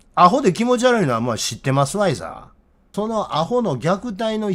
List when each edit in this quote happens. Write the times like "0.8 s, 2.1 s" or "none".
2.8 s

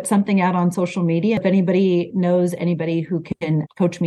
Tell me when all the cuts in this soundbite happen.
1.4 s

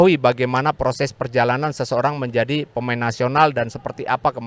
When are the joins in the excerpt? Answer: none

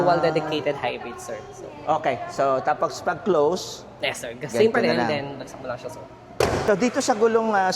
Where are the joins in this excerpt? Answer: none

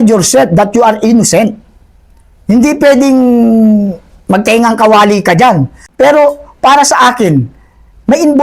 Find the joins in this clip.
5.8 s

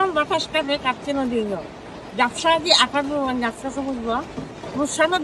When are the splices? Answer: none

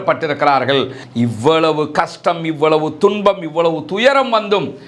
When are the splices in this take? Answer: 1.0 s

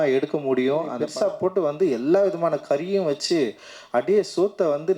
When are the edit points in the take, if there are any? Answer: 1.0 s

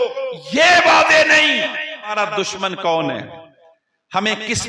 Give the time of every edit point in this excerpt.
2.1 s

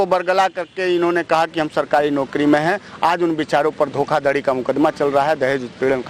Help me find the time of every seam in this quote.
none

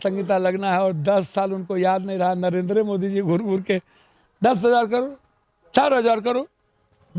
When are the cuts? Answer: none

